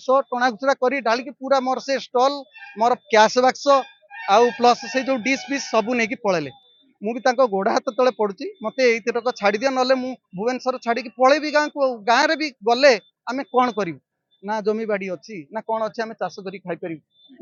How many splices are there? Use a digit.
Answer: 0